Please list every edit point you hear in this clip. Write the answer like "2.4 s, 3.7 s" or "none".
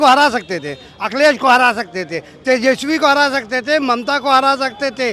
none

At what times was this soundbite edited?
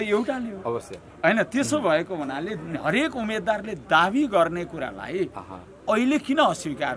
none

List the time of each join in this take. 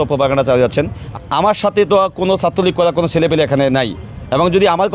1.0 s

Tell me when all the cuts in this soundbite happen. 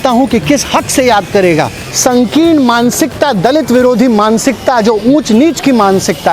1.8 s

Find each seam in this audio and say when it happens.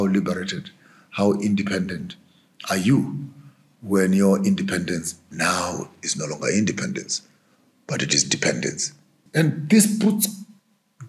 9.1 s

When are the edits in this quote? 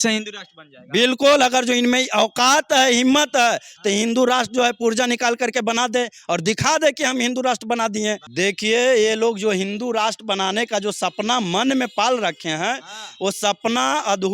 8.3 s

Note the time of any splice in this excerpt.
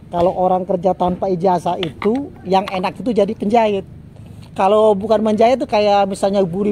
none

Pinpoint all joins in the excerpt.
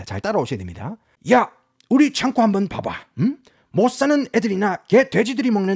1.1 s

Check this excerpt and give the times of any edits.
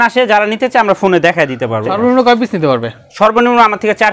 1.9 s

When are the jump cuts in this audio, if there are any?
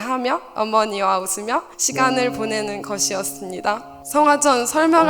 1.8 s, 3.9 s

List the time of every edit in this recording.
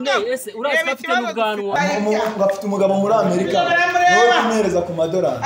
1.8 s

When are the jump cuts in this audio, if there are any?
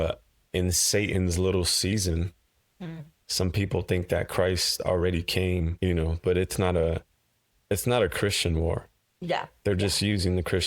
5.7 s

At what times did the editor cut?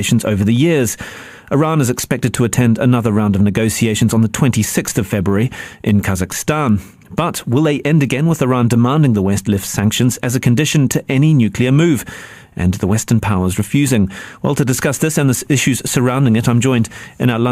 8.8 s

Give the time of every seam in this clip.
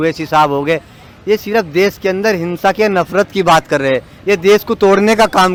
none

